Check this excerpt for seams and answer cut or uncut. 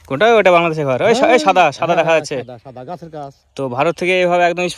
uncut